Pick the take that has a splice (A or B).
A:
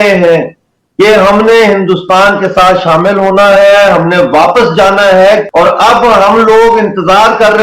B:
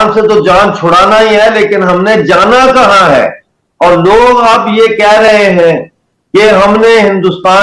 A